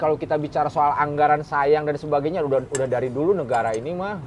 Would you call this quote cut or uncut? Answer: uncut